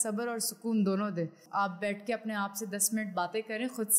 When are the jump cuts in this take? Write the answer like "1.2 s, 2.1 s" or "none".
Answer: 1.4 s